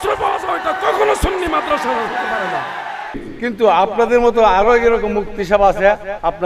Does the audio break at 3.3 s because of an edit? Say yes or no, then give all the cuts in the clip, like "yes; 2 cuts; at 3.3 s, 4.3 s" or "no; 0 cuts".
yes; 1 cut; at 3.3 s